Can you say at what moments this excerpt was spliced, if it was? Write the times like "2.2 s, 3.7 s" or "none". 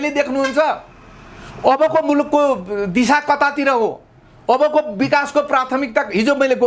none

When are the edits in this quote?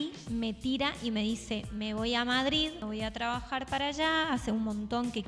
2.8 s

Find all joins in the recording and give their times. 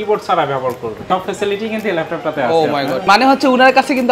1.0 s, 3.0 s

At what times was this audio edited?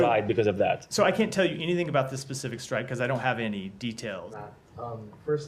4.3 s

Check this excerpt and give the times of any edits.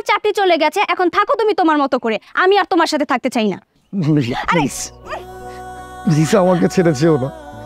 3.5 s

